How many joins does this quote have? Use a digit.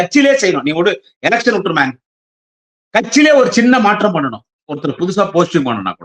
0